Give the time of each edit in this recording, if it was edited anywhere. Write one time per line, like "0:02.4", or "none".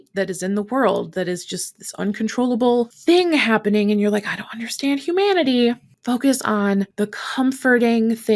0:05.9
0:06.9

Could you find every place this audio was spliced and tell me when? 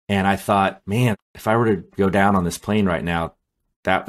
0:01.2

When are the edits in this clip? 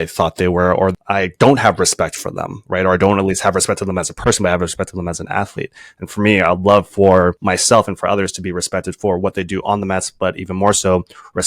0:07.4

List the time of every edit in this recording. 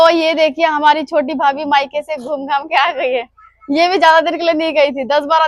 none

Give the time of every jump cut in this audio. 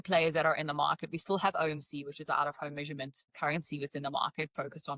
0:03.3

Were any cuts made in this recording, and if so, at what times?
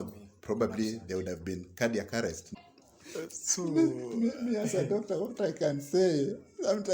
0:02.4

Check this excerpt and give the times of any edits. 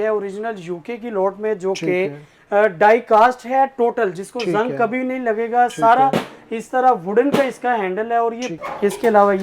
0:08.5

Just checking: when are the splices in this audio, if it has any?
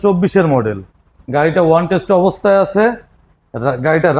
none

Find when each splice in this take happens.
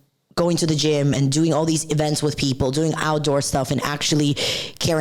none

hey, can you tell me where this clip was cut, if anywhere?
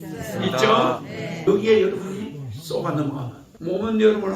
0:01.5
0:03.4

